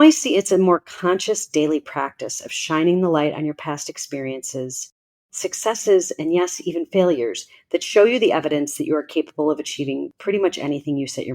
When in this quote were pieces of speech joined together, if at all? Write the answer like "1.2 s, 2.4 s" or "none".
10.1 s